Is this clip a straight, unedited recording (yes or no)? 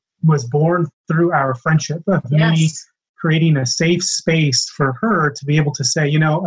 yes